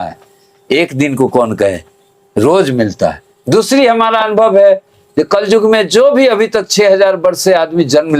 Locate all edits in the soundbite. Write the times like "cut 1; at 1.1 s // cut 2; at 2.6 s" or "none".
cut 1; at 3.3 s